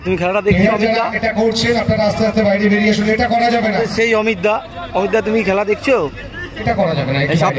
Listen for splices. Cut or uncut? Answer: cut